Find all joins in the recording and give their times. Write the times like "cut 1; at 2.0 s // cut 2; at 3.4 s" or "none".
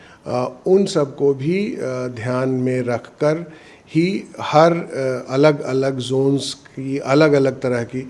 none